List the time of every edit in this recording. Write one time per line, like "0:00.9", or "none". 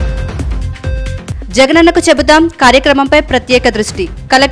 none